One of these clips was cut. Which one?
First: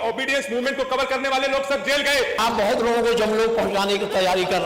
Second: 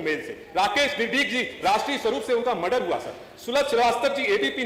first; 1 cut; at 2.4 s

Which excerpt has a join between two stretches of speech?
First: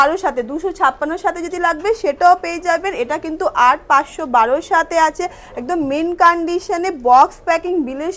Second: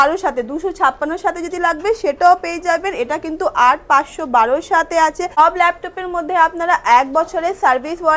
second; 1 cut; at 5.4 s

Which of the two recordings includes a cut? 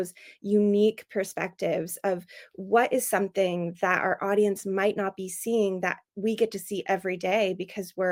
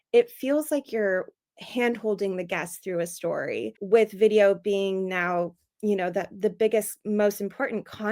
second; 1 cut; at 3.8 s

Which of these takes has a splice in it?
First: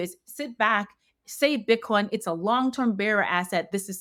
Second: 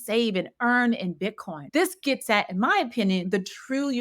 second; 1 cut; at 1.6 s

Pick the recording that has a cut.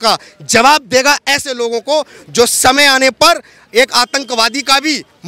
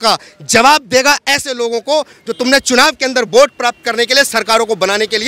second; 1 cut; at 2.2 s

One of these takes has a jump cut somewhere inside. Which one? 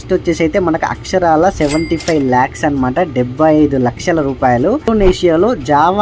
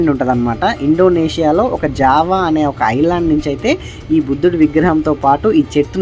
first; 1 cut; at 4.9 s

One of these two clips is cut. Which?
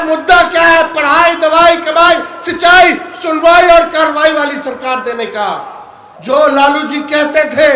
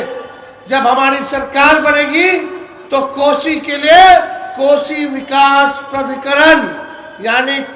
first; 1 cut; at 6.2 s

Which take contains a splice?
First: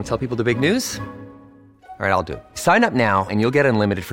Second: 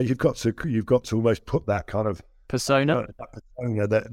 second; 1 cut; at 2.3 s

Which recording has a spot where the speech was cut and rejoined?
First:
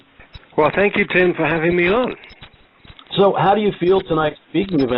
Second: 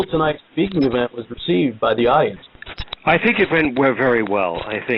first; 1 cut; at 2.2 s

